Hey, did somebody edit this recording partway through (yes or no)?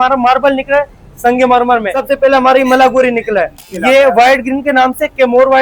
yes